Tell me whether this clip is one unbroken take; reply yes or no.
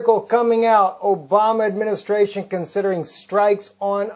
yes